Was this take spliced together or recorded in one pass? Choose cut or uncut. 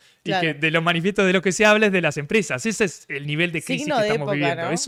uncut